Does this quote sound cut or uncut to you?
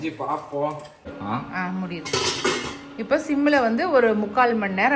cut